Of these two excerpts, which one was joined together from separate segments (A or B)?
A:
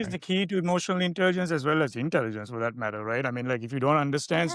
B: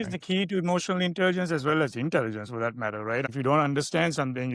B